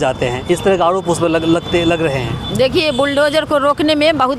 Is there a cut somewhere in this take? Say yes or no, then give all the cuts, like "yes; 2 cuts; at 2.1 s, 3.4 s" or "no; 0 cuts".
no; 0 cuts